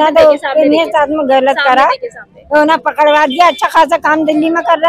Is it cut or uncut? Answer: uncut